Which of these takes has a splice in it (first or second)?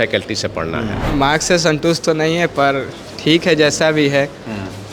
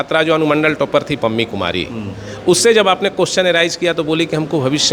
first